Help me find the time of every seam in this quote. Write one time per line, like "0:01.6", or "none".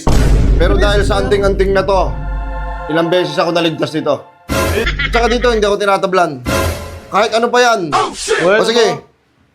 0:04.8